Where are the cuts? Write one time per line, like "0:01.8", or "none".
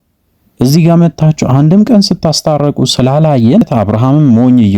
0:03.6